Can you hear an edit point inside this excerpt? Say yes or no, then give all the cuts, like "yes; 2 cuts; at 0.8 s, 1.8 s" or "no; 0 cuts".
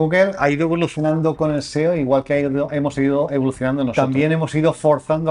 yes; 1 cut; at 3.9 s